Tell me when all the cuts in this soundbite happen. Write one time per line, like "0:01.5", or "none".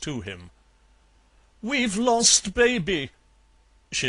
none